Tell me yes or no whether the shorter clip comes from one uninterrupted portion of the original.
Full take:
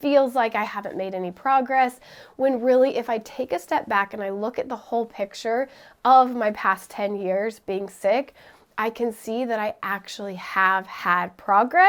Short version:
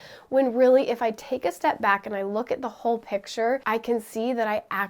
no